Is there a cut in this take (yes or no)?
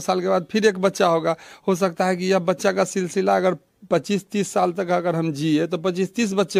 no